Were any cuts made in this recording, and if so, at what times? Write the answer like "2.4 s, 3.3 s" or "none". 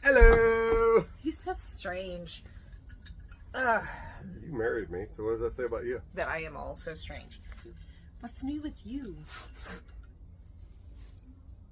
7.4 s